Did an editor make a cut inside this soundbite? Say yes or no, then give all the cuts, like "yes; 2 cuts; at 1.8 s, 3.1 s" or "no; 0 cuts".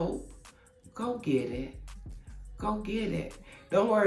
no; 0 cuts